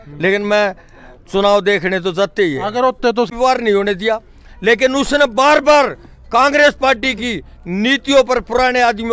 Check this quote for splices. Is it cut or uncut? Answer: cut